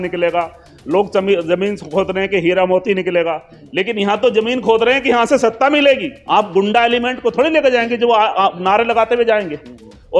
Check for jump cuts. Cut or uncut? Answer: cut